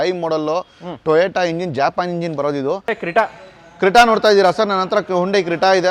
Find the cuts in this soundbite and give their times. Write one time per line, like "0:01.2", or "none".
0:02.9